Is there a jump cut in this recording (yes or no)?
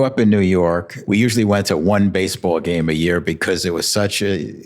yes